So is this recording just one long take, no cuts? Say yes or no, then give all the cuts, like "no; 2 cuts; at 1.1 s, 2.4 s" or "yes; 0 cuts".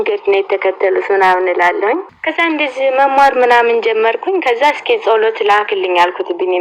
no; 1 cut; at 2.0 s